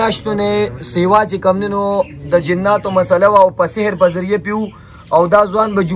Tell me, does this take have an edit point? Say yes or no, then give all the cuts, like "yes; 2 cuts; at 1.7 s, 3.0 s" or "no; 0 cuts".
no; 0 cuts